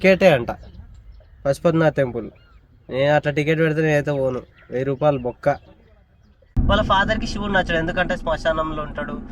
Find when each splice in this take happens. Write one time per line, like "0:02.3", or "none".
0:06.5